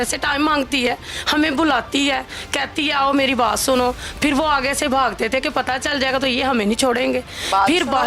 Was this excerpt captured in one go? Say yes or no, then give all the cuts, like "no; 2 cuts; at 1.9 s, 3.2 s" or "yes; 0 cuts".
yes; 0 cuts